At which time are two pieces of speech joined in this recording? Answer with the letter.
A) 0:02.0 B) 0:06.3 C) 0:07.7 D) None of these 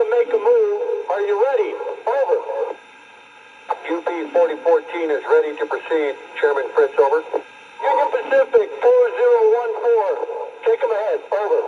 D